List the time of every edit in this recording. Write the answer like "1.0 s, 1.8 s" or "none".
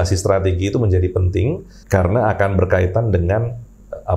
1.7 s